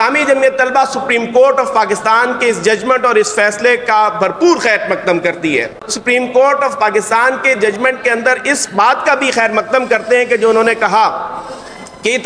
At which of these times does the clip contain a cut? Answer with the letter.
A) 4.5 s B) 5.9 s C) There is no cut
B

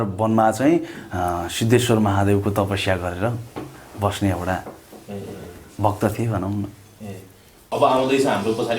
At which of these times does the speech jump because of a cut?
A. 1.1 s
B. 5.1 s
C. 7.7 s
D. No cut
C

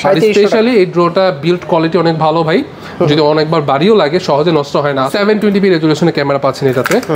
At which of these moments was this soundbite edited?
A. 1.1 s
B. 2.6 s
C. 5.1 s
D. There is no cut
C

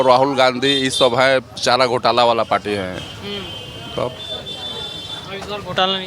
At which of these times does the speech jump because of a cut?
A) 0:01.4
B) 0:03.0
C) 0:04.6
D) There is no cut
D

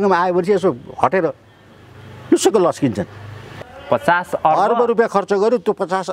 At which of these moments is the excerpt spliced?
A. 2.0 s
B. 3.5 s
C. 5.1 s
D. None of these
B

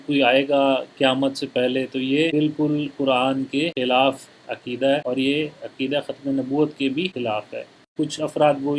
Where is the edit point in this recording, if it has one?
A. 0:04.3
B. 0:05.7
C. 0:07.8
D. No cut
C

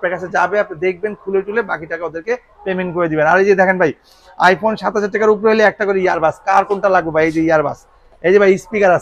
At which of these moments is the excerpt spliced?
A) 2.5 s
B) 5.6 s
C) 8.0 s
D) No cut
D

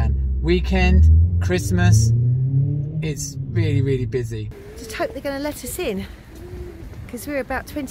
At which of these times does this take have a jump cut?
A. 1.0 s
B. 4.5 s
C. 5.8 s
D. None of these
B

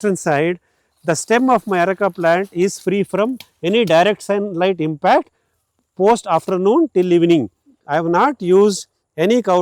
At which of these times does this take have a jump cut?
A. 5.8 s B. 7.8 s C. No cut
B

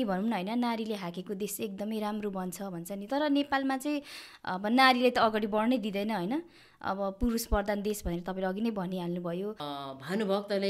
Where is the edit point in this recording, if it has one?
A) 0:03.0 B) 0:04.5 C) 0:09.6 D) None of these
C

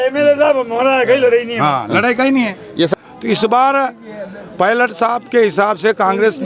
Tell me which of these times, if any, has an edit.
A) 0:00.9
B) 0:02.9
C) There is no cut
B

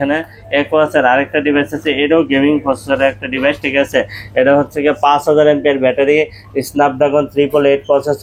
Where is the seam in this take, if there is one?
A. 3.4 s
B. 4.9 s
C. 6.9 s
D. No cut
D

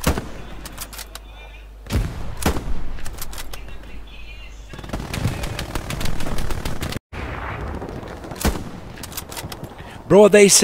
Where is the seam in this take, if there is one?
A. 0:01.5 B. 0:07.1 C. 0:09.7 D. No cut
B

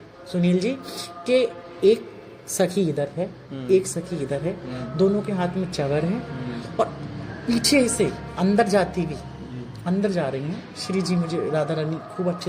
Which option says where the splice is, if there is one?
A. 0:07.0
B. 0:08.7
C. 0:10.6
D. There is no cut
D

